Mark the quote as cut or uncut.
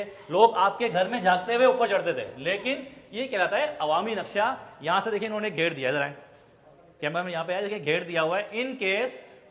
uncut